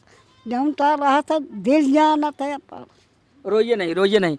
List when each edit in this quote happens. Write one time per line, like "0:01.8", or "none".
none